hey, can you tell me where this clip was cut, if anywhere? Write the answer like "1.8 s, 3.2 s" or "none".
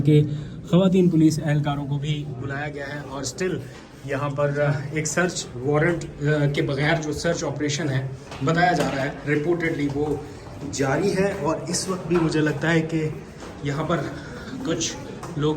none